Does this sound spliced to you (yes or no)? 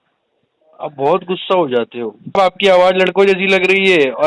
yes